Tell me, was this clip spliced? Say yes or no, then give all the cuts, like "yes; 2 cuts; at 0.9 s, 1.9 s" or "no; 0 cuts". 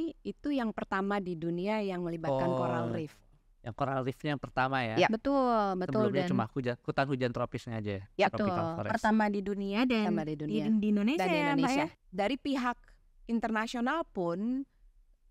yes; 1 cut; at 12.0 s